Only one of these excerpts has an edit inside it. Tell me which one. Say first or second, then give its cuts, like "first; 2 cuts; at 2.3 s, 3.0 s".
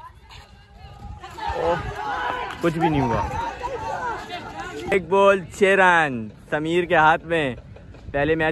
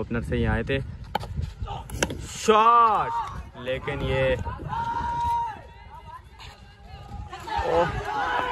first; 1 cut; at 4.9 s